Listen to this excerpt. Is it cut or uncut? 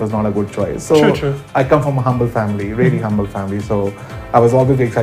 cut